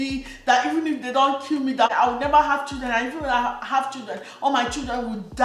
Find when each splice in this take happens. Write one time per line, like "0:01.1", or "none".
0:01.9